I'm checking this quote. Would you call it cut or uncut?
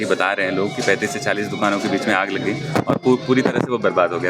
uncut